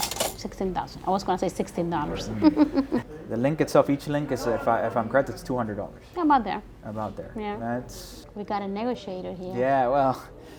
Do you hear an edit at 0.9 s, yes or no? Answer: no